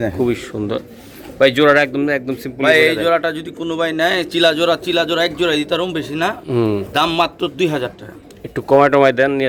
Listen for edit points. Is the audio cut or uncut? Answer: uncut